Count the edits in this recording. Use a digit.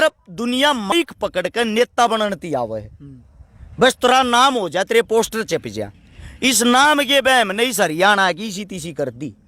1